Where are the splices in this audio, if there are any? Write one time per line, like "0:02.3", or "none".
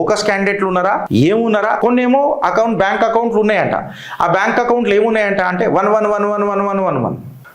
0:01.8